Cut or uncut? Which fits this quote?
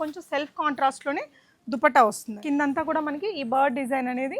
cut